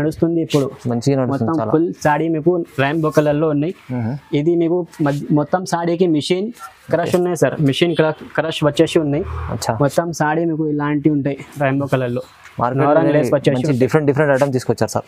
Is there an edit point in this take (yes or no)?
no